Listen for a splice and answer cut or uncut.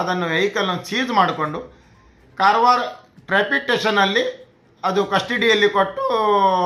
uncut